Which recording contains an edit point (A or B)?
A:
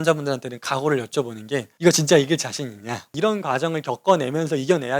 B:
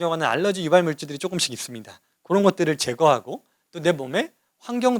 A